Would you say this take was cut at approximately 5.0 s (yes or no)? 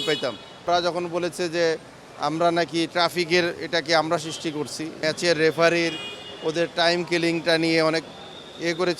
yes